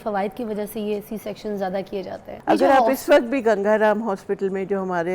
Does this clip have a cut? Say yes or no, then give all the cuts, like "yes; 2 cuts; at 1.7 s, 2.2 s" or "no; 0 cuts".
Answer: yes; 1 cut; at 2.2 s